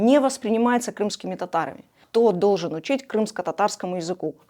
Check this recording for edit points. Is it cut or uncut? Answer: cut